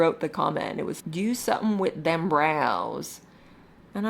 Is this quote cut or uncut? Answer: cut